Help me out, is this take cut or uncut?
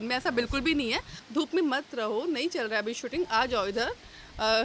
cut